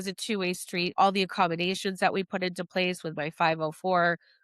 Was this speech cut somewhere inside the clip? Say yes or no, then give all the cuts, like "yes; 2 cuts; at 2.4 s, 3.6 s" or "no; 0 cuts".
yes; 1 cut; at 0.9 s